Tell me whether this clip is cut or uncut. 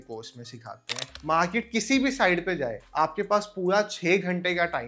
cut